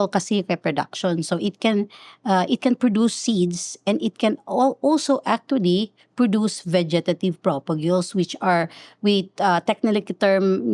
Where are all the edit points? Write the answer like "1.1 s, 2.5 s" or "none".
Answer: none